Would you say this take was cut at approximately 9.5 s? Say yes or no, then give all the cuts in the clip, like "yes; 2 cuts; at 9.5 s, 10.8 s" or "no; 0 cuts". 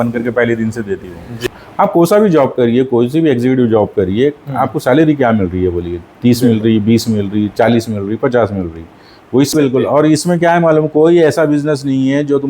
yes; 2 cuts; at 1.4 s, 9.5 s